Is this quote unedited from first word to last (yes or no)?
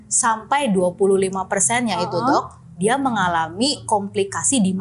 no